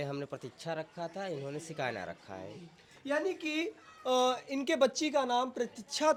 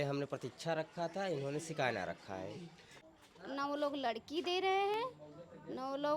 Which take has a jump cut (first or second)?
second